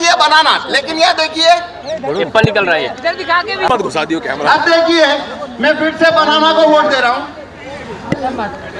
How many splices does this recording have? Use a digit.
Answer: 1